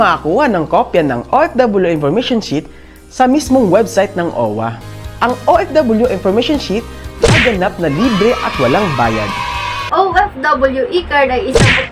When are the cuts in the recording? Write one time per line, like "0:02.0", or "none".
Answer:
0:04.9
0:09.8